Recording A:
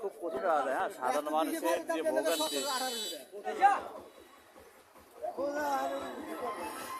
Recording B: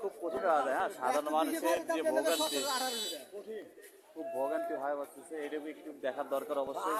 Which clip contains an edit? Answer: A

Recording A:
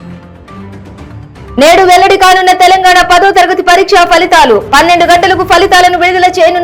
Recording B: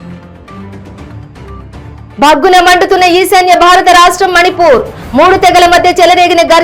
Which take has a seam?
B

